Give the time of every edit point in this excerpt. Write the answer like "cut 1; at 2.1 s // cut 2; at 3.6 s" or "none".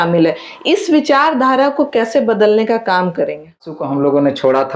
cut 1; at 3.8 s